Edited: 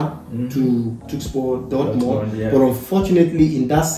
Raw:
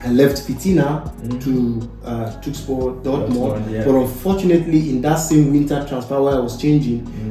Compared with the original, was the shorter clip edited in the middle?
yes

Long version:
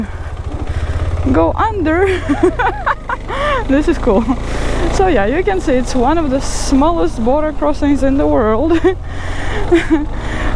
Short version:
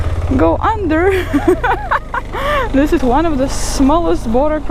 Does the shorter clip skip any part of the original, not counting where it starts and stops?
yes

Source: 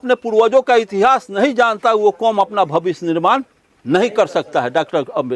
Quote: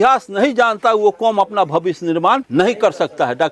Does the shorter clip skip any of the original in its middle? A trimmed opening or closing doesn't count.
yes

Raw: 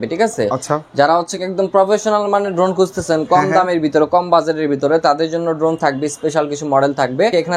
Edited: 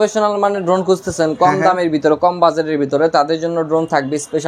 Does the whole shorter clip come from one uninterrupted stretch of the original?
yes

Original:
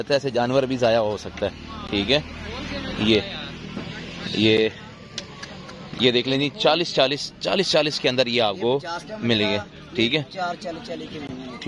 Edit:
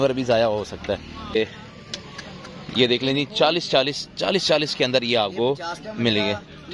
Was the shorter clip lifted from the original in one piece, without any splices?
no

